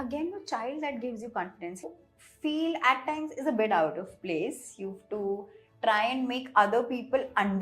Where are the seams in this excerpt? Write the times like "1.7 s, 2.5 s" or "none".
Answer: 1.9 s